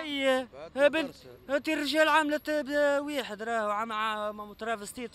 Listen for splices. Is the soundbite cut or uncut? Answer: uncut